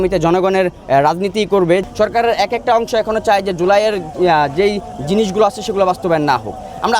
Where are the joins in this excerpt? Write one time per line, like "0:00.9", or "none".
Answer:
0:01.8